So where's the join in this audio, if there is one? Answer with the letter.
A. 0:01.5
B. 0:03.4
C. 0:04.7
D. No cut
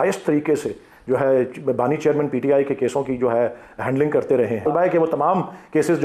C